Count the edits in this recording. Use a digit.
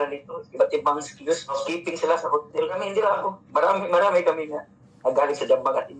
2